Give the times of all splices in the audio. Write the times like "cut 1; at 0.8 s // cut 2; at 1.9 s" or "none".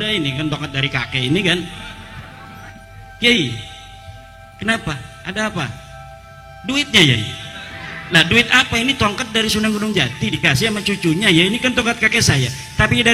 cut 1; at 2.7 s